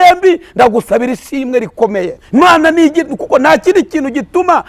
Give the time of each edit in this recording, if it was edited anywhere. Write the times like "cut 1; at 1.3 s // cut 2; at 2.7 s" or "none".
cut 1; at 2.2 s